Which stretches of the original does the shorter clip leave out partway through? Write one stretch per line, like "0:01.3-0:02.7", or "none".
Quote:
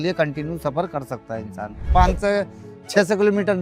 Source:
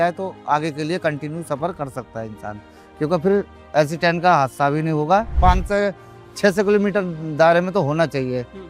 0:02.7-0:05.3